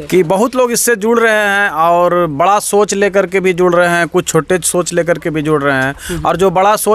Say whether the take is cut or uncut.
uncut